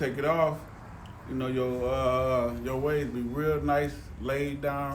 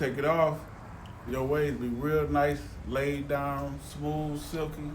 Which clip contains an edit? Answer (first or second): second